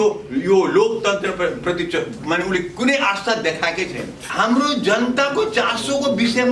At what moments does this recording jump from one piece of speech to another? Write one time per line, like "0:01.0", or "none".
0:04.1